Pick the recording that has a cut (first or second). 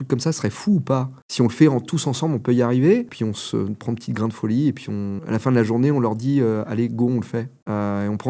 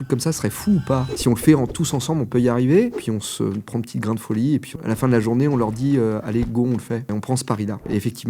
second